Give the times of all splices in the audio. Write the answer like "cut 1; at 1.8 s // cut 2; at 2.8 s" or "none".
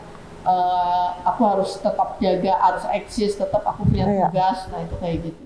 none